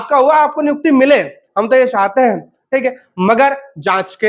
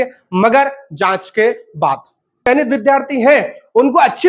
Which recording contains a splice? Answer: second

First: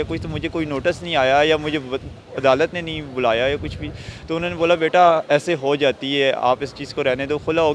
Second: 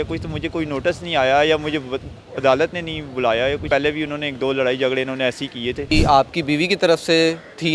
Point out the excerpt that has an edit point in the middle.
second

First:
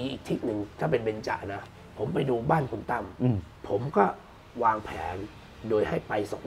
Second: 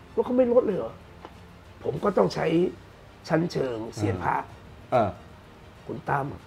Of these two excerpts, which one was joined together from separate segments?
first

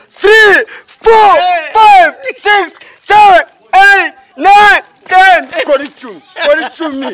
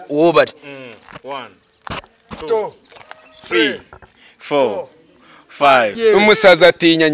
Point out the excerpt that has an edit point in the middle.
second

